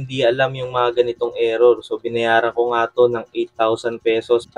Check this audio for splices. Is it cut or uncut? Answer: uncut